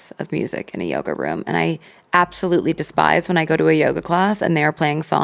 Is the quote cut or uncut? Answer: uncut